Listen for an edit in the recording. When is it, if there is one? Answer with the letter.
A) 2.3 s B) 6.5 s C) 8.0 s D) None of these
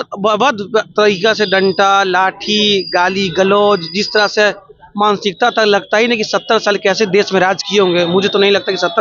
D